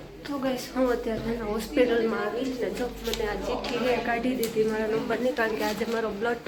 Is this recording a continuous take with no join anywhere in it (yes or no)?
yes